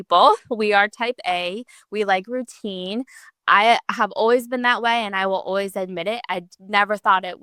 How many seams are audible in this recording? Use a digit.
0